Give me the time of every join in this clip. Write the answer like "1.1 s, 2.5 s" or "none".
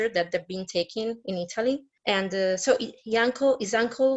1.9 s